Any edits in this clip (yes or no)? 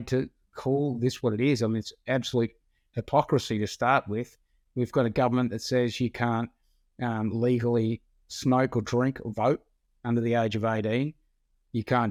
no